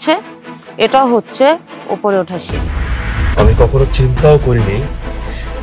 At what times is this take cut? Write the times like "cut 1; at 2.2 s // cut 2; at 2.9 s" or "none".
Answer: cut 1; at 3.2 s